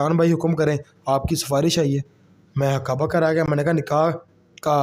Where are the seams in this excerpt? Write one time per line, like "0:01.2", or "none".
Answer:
none